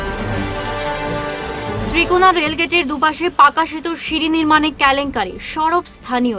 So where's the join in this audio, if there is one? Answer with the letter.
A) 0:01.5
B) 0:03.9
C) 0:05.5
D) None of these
A